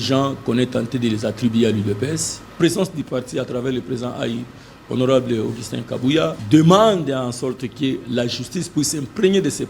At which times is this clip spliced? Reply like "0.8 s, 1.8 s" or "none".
2.6 s, 6.4 s